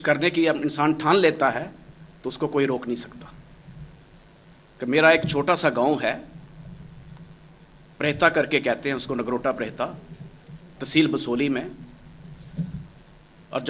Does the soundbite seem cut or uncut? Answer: cut